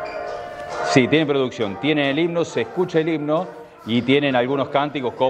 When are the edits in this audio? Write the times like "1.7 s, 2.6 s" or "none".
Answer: none